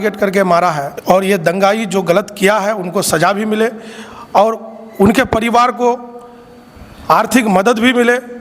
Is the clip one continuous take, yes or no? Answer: no